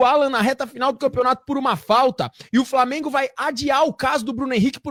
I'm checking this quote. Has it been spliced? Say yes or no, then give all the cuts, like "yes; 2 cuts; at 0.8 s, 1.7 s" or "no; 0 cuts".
no; 0 cuts